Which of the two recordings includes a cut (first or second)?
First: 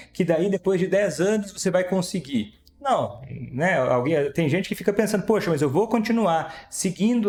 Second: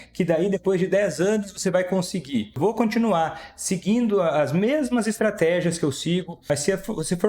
second